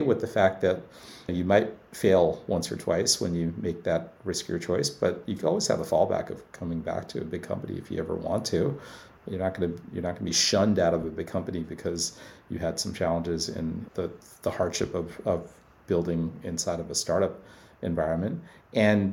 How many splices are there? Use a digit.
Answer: 2